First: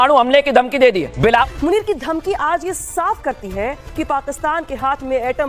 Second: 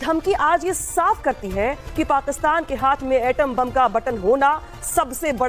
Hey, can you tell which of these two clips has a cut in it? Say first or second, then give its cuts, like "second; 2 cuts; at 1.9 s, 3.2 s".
first; 1 cut; at 1.1 s